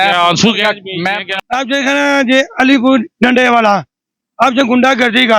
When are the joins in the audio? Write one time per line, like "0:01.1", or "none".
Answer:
0:01.2